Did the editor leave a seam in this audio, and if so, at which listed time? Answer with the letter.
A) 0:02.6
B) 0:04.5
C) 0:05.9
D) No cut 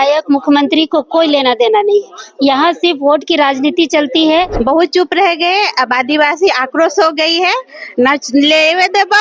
B